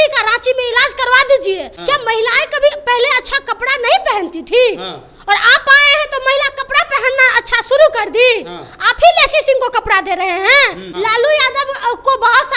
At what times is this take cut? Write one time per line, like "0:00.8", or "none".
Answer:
0:01.7
0:10.9